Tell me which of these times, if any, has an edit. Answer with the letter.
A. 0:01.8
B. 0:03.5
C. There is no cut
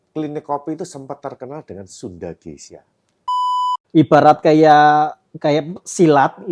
B